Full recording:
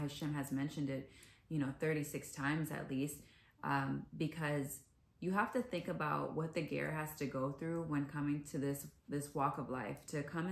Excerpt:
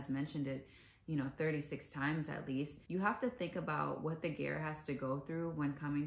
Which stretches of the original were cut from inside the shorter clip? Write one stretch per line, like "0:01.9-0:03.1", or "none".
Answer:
0:03.2-0:05.1